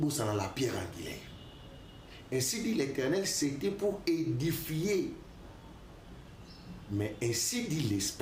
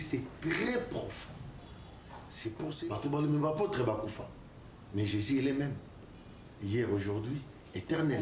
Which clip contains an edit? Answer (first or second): second